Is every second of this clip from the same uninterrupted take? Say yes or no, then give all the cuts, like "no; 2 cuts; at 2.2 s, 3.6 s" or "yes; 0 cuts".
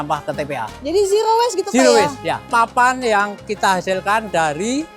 no; 2 cuts; at 2.4 s, 3.5 s